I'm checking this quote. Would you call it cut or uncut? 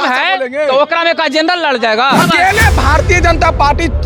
cut